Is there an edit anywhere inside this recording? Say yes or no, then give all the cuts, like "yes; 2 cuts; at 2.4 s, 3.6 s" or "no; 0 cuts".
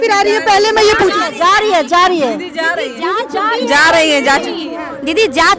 no; 0 cuts